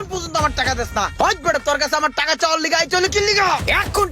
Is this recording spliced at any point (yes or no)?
yes